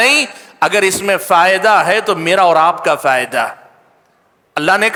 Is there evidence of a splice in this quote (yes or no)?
no